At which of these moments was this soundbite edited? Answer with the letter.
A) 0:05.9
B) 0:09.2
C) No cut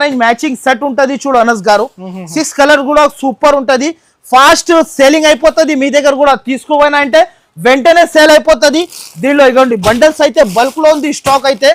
C